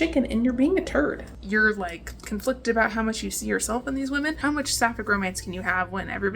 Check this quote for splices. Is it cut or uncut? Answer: cut